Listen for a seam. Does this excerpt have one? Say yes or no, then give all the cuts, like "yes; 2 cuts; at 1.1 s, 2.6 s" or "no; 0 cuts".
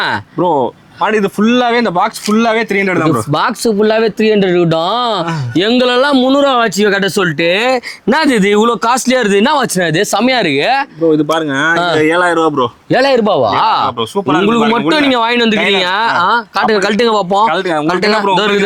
no; 0 cuts